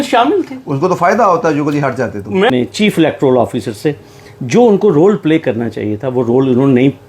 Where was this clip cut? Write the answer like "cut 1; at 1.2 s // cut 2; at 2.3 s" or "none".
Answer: cut 1; at 2.5 s